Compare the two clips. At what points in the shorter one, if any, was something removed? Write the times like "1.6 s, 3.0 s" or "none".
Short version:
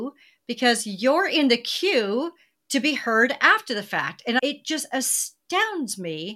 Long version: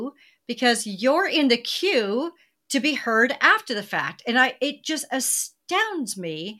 4.4 s